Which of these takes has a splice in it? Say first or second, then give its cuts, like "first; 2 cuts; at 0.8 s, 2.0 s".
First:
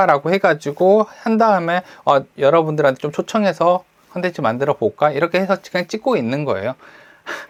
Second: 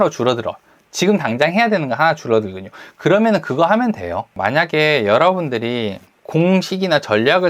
second; 2 cuts; at 4.4 s, 6.1 s